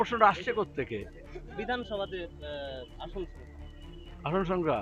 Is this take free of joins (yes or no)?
yes